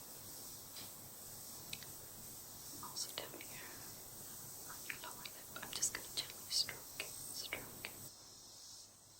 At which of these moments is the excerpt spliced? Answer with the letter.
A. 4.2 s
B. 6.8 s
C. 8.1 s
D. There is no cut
C